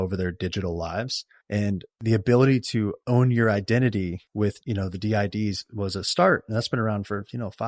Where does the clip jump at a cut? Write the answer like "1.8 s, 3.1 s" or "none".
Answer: 4.4 s